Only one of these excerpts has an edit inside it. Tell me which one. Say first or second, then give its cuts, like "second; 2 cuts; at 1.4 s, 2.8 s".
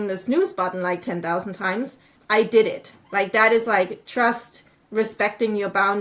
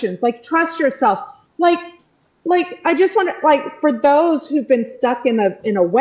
first; 1 cut; at 2.1 s